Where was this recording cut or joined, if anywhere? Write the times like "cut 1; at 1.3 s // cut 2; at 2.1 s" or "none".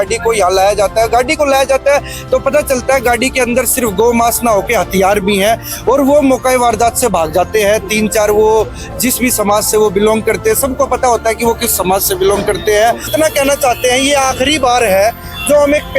cut 1; at 13.1 s